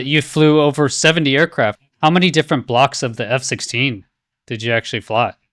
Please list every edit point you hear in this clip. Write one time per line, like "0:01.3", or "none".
0:01.8